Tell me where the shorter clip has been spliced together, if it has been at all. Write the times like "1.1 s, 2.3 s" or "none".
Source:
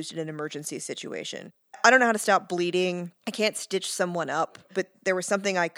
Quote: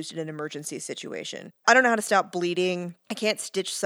1.5 s